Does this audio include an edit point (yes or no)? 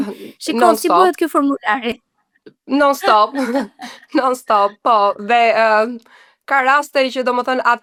no